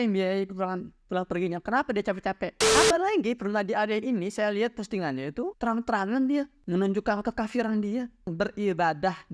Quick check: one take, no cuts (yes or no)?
no